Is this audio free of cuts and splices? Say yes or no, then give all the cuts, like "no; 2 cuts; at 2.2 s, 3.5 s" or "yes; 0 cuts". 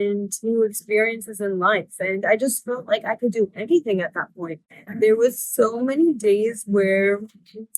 no; 1 cut; at 4.9 s